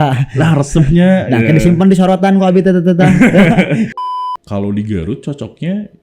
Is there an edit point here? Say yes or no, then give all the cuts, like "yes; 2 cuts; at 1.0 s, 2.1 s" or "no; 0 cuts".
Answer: yes; 1 cut; at 3.9 s